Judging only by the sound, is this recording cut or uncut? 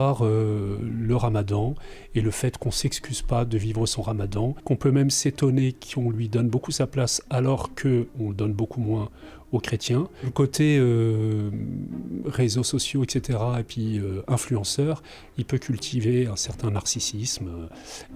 cut